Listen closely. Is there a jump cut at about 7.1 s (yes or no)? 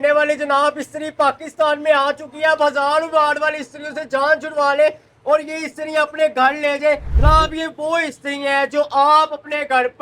yes